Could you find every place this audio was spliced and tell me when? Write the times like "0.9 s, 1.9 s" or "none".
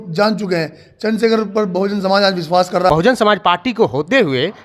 2.9 s